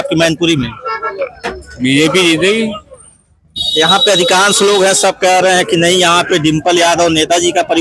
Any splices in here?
no; 0 cuts

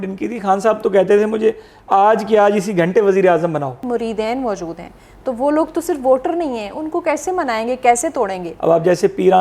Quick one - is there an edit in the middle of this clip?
yes; 2 cuts; at 3.8 s, 8.5 s

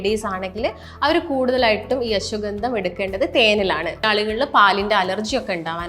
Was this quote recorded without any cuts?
no; 1 cut; at 4.0 s

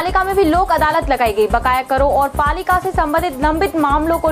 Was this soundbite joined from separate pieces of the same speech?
no; 0 cuts

